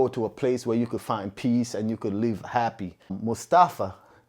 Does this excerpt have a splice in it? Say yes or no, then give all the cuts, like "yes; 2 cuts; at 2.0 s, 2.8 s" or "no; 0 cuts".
yes; 1 cut; at 3.1 s